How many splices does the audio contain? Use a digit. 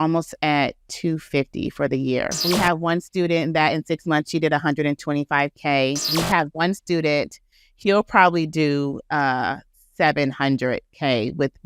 3